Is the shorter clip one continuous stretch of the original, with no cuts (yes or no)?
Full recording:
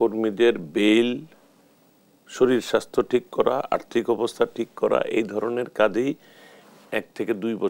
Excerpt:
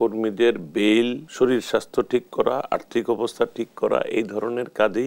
no